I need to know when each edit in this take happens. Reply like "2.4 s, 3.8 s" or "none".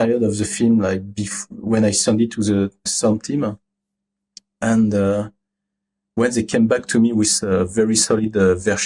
none

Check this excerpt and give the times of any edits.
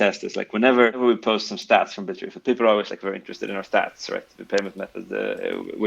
1.0 s

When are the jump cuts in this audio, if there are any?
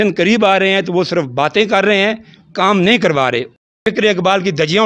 3.5 s

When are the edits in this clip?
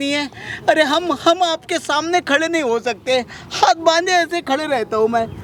none

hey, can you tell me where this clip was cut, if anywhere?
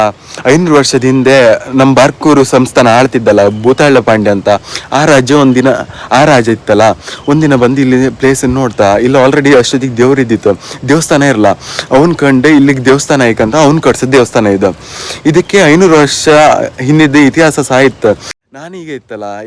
none

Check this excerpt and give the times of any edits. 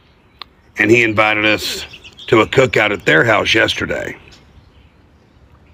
none

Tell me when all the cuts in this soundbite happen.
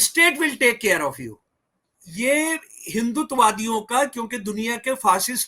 2.0 s

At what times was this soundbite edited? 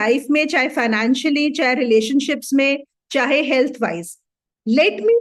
none

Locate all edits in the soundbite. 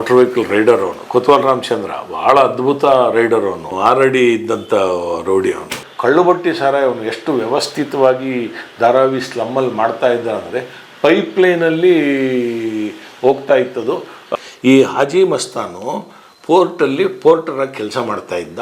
3.7 s, 5.8 s, 14.2 s

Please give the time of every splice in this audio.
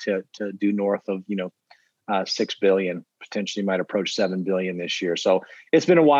none

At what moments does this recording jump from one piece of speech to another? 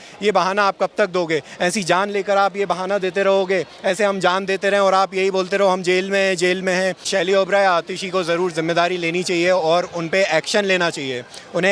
7.1 s

